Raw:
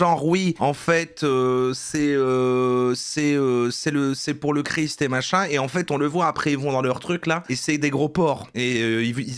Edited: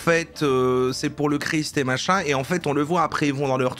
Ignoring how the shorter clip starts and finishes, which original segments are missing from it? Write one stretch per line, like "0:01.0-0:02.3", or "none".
0:01.8-0:04.2